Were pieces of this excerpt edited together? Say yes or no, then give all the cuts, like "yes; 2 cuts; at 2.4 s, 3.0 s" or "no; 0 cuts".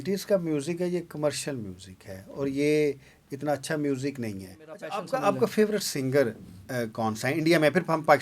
yes; 1 cut; at 4.9 s